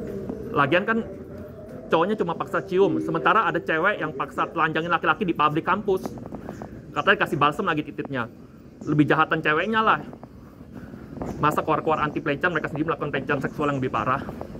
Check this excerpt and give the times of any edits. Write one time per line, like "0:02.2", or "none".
none